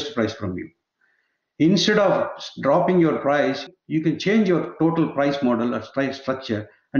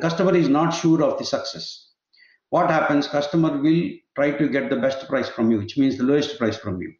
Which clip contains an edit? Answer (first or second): first